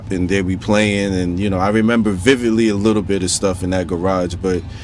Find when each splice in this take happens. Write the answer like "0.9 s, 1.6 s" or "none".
none